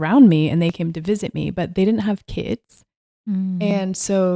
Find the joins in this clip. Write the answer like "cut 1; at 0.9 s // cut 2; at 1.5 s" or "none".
none